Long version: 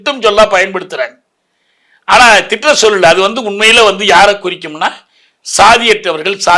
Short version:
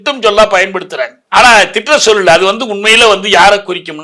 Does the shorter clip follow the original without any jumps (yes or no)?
no